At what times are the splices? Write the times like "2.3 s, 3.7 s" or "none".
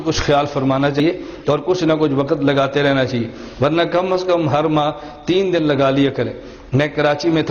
1.0 s